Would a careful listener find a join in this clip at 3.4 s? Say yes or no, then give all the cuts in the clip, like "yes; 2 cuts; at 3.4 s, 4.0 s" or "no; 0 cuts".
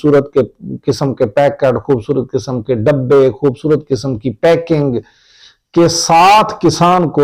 no; 0 cuts